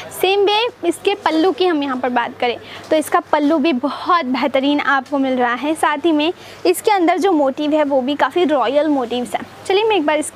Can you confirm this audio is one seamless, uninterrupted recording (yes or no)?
yes